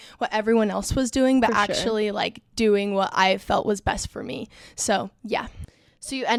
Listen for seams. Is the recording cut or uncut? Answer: uncut